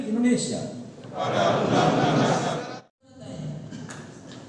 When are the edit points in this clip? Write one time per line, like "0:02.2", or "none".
0:02.6